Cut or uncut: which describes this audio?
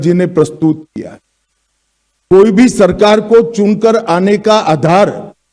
uncut